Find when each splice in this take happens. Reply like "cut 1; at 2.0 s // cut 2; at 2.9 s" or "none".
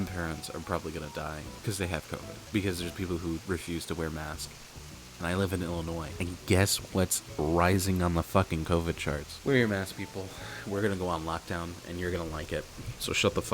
cut 1; at 1.5 s // cut 2; at 2.4 s // cut 3; at 6.1 s // cut 4; at 9.3 s